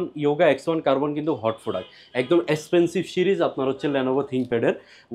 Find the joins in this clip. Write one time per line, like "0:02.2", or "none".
none